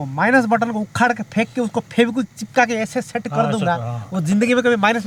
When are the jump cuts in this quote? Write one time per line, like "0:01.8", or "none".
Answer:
none